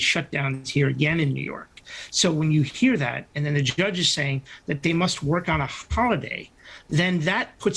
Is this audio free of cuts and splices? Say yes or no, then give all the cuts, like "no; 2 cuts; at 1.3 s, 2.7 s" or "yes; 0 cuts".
yes; 0 cuts